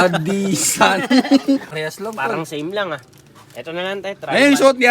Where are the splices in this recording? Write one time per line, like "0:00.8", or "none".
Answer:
0:01.7